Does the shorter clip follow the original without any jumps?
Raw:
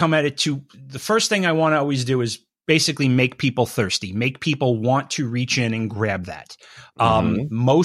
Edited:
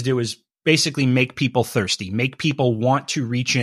yes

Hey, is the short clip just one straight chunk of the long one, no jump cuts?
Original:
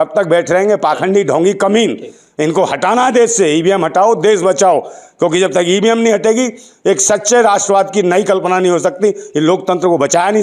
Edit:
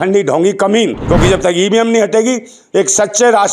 no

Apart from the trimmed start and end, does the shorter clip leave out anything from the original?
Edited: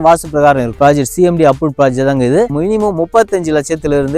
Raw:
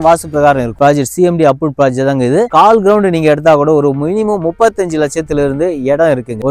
yes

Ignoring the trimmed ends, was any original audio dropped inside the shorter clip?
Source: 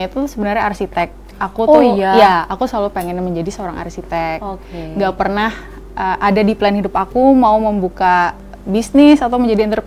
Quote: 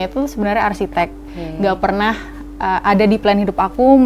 yes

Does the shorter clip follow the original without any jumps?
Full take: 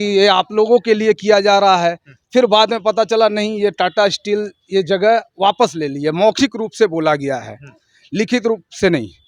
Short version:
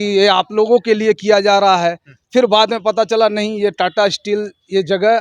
yes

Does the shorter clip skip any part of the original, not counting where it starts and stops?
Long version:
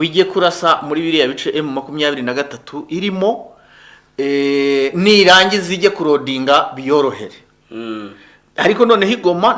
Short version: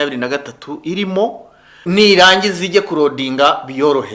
yes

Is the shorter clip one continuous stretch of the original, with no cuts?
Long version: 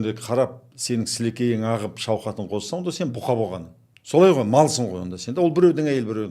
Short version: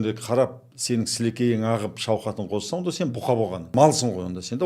no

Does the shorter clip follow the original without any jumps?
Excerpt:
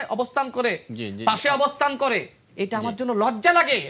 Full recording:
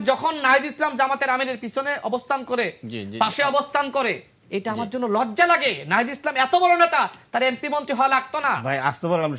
yes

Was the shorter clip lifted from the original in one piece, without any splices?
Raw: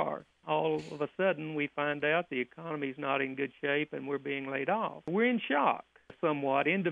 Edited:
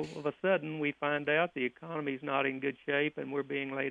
yes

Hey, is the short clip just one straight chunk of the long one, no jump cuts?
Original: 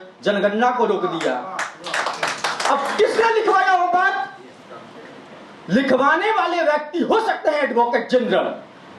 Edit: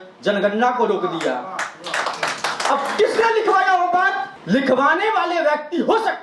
no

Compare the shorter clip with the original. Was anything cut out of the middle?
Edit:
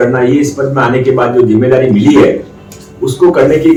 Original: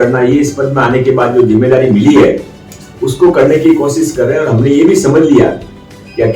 no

